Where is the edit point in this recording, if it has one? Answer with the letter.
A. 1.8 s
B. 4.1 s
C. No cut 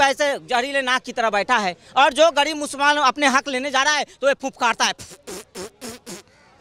C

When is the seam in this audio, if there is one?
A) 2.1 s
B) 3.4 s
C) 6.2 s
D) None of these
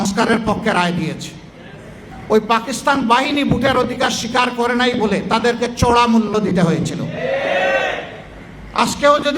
A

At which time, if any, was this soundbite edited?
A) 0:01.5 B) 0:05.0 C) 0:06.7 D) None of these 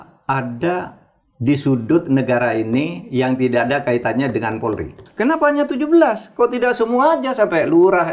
B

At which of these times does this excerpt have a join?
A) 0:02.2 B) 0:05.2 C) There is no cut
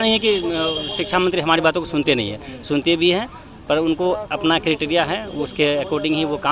C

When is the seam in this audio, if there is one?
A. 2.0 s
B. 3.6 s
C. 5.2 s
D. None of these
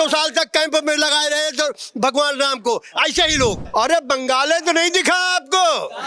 B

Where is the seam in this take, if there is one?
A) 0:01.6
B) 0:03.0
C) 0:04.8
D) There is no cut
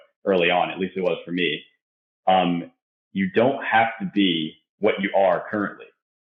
D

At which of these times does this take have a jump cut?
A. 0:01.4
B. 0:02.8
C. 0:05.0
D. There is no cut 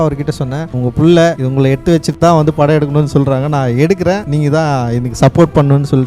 A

